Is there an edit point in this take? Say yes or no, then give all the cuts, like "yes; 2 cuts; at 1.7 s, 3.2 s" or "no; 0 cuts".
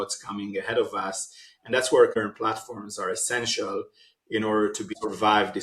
yes; 2 cuts; at 2.1 s, 4.9 s